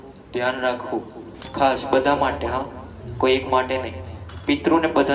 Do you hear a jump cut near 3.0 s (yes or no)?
no